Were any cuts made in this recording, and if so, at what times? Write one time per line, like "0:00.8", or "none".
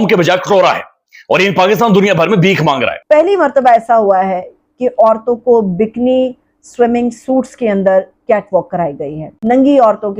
0:02.9
0:09.3